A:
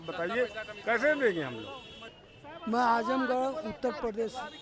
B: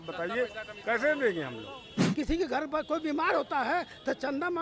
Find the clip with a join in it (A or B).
B